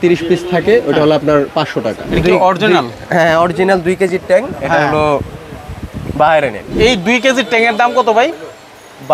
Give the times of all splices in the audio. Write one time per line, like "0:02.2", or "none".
0:02.0
0:06.6